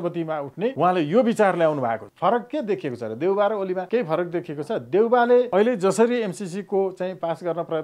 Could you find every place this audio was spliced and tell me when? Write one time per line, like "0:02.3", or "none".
0:00.7
0:02.1
0:03.8
0:05.5